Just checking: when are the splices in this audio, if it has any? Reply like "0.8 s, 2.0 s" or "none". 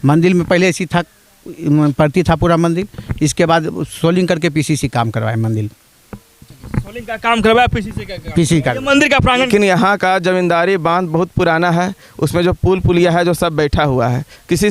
9.5 s